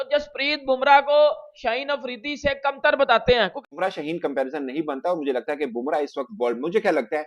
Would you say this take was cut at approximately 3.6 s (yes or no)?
yes